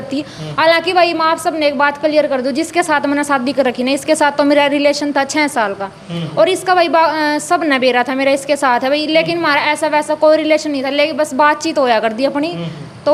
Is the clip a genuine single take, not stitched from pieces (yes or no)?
yes